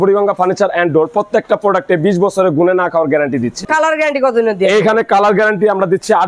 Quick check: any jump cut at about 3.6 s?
yes; 1 cut; at 3.6 s

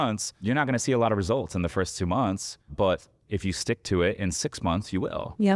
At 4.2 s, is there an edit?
no; 1 cut; at 2.7 s

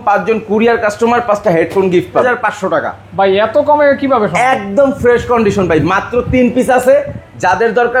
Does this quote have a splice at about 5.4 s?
no; 1 cut; at 2.2 s

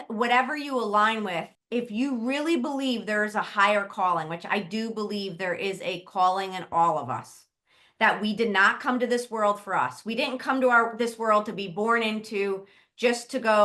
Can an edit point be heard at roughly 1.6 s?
yes; 1 cut; at 1.6 s

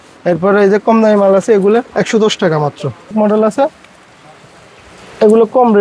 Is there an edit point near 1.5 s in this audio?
no; 1 cut; at 3.1 s

